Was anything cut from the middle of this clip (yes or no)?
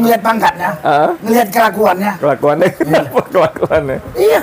no